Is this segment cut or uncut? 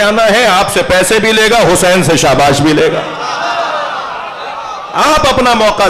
uncut